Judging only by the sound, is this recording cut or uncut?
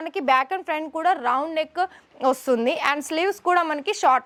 uncut